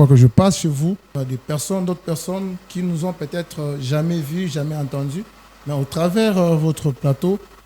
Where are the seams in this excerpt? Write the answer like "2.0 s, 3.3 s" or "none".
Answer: 1.1 s